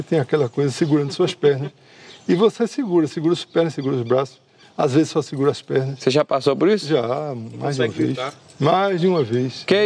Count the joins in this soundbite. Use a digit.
0